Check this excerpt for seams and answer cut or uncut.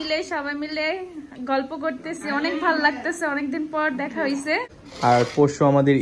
cut